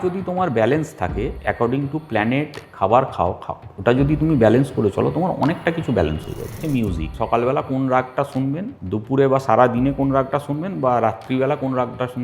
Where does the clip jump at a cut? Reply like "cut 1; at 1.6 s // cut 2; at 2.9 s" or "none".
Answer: cut 1; at 1.4 s // cut 2; at 6.7 s // cut 3; at 8.7 s